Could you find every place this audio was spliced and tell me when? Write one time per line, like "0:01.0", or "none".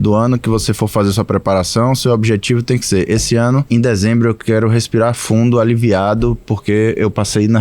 0:03.7

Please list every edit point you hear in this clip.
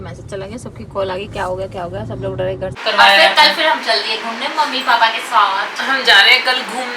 0:02.7

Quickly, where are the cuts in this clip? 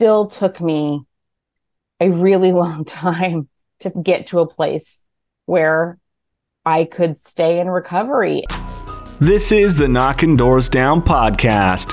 0:08.4

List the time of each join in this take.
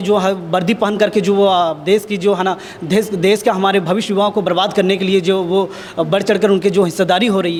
none

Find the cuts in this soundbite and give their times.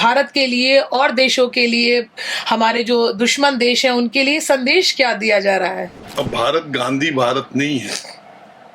0:06.0

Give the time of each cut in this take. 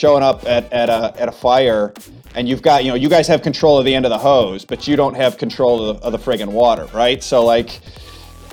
0:01.1
0:07.8

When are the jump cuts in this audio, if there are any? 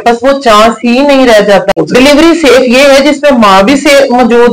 0:01.7

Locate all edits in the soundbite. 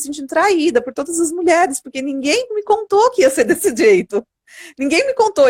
none

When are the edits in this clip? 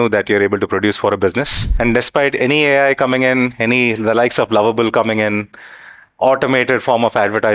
0:01.6

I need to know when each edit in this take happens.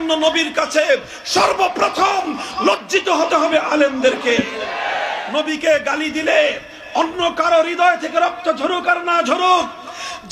0:05.2

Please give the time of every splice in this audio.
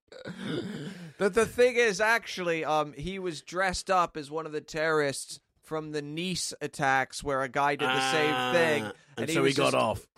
0:04.6

